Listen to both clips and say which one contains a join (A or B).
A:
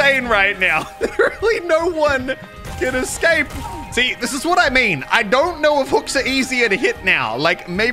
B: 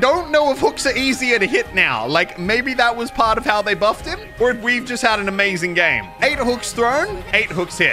A